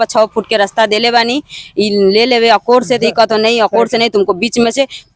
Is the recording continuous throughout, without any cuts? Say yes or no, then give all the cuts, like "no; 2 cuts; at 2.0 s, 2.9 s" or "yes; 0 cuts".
yes; 0 cuts